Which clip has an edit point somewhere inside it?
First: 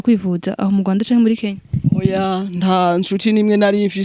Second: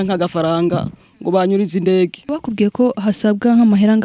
second; 1 cut; at 2.4 s

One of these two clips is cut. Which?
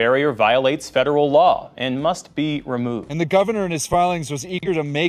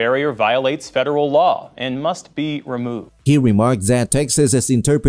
first; 1 cut; at 3.0 s

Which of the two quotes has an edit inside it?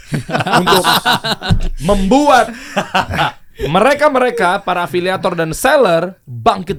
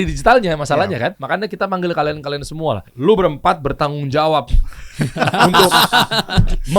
second; 2 cuts; at 1.2 s, 2.9 s

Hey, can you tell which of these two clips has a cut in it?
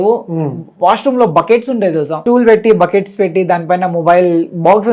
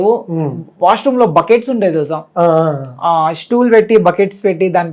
first; 1 cut; at 2.2 s

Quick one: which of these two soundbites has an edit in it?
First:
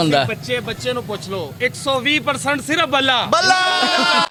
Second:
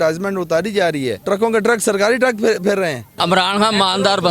second; 2 cuts; at 1.2 s, 3.1 s

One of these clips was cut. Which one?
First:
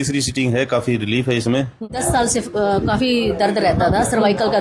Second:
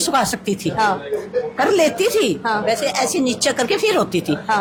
first; 1 cut; at 1.9 s

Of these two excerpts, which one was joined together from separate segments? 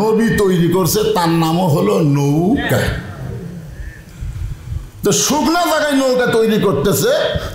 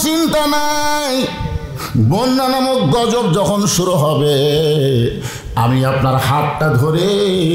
first; 1 cut; at 4.1 s

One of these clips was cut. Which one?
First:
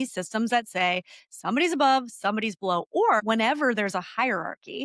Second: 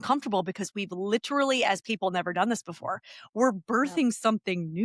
first; 1 cut; at 3.2 s

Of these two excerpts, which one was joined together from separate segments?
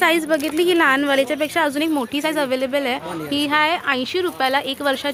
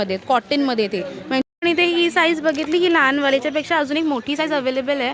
second; 1 cut; at 1.2 s

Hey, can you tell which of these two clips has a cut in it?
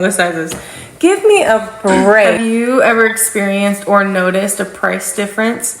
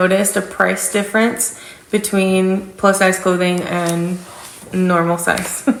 first; 1 cut; at 2.4 s

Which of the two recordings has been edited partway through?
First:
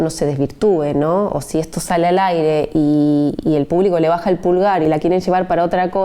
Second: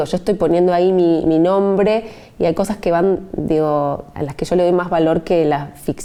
first; 1 cut; at 4.9 s

